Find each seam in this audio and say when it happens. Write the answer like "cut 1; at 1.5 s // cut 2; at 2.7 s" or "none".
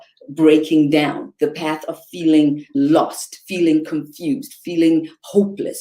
cut 1; at 2.7 s